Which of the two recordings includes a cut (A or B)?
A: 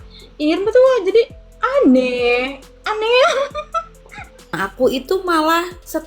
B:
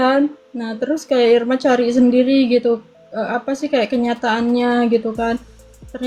A